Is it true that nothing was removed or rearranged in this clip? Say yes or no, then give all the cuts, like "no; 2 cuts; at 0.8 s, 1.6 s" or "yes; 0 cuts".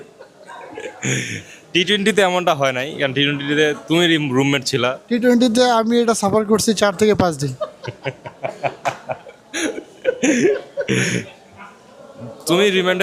yes; 0 cuts